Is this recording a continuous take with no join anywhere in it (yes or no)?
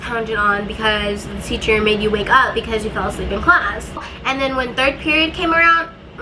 no